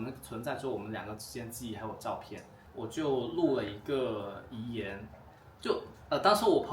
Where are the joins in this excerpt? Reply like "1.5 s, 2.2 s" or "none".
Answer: 2.6 s